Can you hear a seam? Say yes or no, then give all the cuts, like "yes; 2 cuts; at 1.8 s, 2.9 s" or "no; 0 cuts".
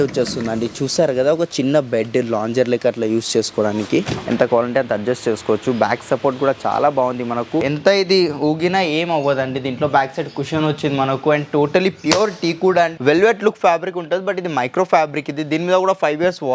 yes; 3 cuts; at 4.2 s, 7.6 s, 13.0 s